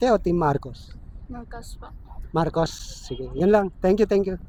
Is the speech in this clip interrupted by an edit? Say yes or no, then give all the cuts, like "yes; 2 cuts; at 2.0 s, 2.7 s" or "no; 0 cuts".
no; 0 cuts